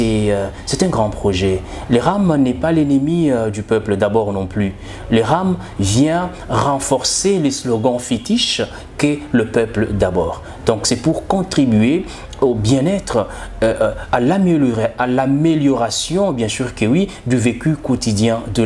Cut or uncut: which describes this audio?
uncut